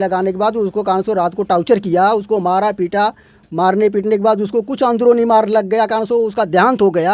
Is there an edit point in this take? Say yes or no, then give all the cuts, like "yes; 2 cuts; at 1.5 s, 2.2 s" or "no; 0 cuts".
no; 0 cuts